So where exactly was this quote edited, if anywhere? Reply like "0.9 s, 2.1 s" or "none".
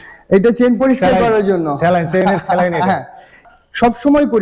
3.3 s